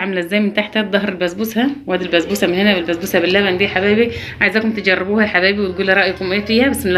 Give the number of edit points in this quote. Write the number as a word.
zero